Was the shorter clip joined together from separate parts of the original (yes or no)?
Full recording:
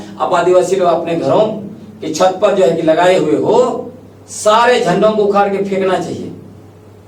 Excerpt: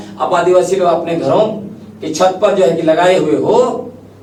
no